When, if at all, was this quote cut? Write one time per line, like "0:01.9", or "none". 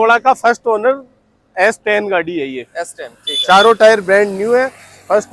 none